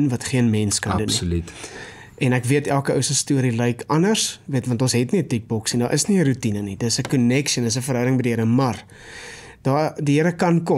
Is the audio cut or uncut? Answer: uncut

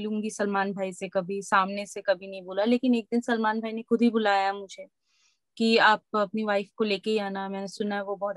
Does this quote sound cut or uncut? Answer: uncut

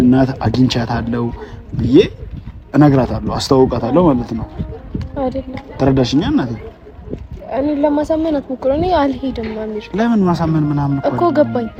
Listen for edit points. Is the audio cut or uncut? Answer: uncut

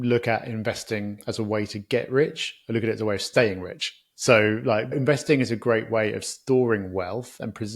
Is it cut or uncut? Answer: cut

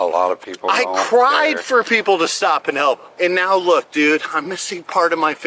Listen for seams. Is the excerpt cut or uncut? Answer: cut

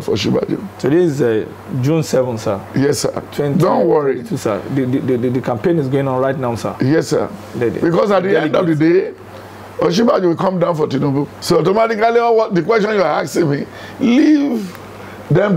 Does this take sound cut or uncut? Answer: cut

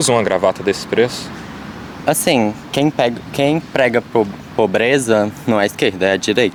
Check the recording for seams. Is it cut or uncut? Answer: uncut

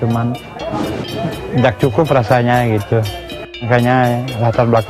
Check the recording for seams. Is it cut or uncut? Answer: cut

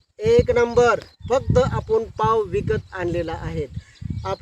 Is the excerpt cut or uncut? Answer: uncut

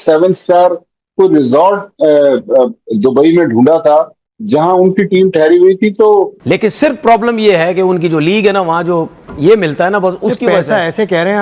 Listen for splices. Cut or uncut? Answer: cut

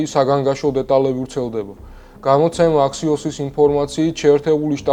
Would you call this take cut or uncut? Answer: uncut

